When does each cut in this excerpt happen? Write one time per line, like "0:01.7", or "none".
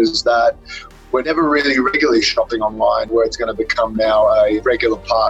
0:01.3
0:03.1
0:04.6